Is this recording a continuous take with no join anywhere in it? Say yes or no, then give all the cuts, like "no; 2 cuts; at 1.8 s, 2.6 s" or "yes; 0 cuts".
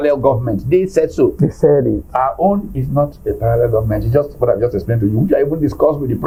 yes; 0 cuts